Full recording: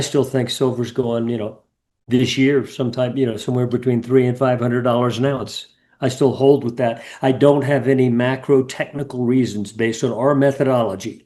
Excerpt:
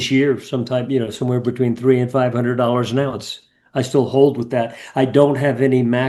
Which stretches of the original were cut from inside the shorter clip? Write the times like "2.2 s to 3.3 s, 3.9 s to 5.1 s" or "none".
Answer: none